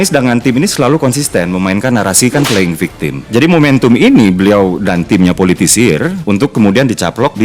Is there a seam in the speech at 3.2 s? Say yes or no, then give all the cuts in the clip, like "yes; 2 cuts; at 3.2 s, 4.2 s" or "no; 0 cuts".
yes; 1 cut; at 3.2 s